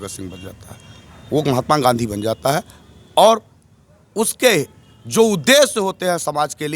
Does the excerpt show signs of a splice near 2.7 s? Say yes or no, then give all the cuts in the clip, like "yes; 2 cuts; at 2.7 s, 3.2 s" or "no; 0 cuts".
no; 0 cuts